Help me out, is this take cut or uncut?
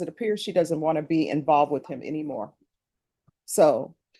uncut